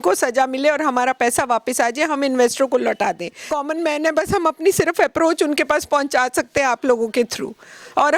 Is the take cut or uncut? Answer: cut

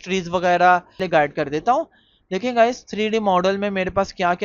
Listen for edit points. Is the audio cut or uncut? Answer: cut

